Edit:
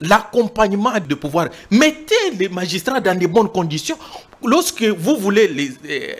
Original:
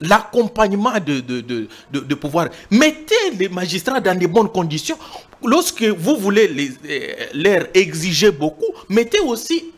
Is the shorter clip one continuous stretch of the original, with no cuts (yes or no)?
no